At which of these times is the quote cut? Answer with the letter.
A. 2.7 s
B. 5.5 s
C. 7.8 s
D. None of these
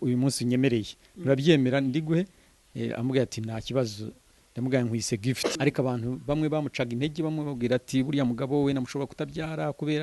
B